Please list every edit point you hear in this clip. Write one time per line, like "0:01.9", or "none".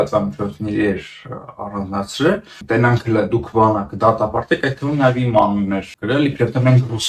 0:02.5
0:05.9